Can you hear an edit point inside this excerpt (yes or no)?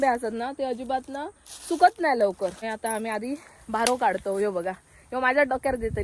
yes